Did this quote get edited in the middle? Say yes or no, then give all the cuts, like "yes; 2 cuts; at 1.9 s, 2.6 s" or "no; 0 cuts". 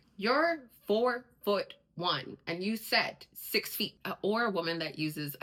no; 0 cuts